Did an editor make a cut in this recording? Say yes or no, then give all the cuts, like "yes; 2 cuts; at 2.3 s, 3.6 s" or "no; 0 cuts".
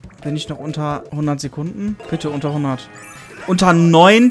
yes; 2 cuts; at 1.1 s, 2.0 s